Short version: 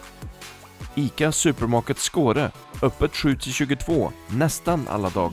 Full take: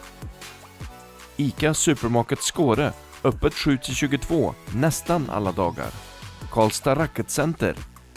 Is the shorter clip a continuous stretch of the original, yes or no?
no